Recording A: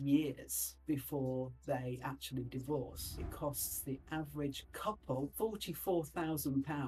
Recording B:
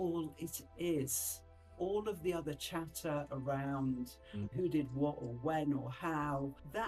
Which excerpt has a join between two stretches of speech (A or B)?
A